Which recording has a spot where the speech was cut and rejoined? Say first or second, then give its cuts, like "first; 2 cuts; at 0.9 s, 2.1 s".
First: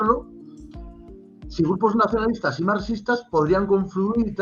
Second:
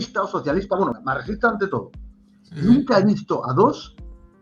second; 1 cut; at 0.9 s